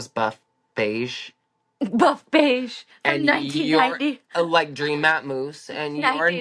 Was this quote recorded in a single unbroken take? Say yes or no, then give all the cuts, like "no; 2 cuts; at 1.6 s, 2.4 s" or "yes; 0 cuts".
yes; 0 cuts